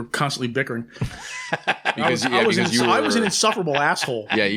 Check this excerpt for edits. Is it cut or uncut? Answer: uncut